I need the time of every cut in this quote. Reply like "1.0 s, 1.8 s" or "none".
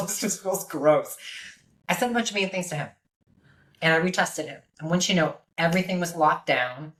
none